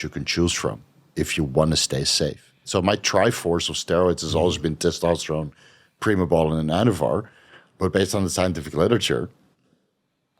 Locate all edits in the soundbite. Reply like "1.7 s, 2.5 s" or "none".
2.6 s